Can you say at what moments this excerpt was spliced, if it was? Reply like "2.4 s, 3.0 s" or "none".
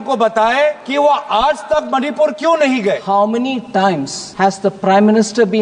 0.8 s, 3.0 s, 4.2 s